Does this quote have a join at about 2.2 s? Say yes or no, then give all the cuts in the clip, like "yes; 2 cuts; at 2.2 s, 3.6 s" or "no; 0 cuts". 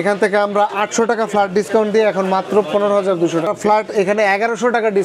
no; 1 cut; at 3.5 s